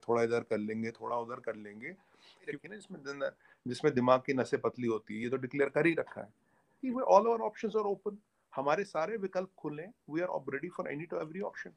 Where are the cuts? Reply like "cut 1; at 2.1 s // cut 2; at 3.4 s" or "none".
cut 1; at 6.8 s